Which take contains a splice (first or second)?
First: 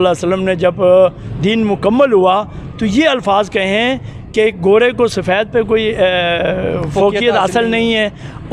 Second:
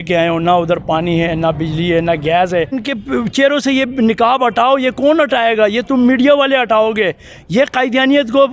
second